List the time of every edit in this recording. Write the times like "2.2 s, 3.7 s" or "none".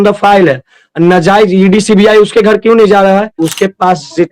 3.4 s